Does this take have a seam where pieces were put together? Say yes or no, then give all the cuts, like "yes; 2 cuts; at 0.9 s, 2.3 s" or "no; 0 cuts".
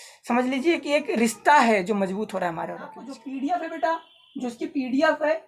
yes; 1 cut; at 3.1 s